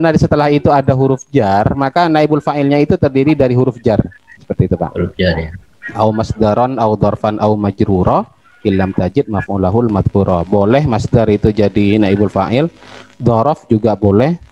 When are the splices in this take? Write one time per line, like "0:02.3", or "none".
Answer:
0:04.2